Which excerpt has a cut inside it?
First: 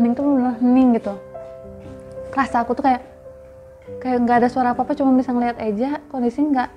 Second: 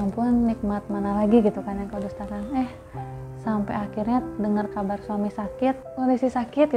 second; 1 cut; at 5.8 s

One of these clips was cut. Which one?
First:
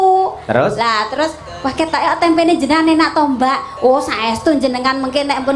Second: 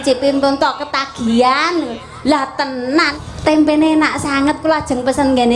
second; 1 cut; at 3.2 s

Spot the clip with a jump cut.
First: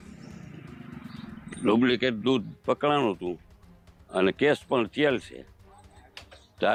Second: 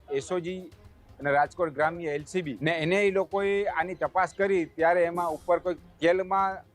second; 1 cut; at 2.5 s

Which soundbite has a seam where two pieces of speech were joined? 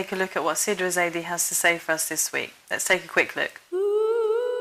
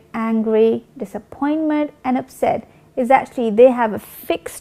second; 1 cut; at 2.3 s

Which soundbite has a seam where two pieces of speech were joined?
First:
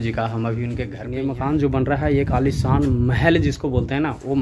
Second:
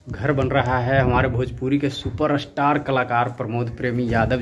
first; 1 cut; at 1.0 s

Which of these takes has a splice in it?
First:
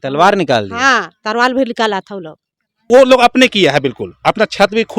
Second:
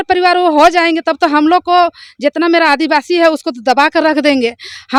first; 1 cut; at 2.7 s

